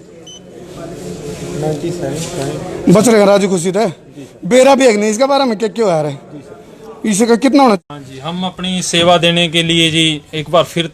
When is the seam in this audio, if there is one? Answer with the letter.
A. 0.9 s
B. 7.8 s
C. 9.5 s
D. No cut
B